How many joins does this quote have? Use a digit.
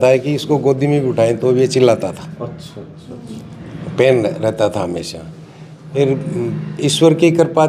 0